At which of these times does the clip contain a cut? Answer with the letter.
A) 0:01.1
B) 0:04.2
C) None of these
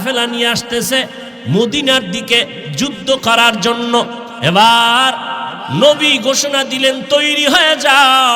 B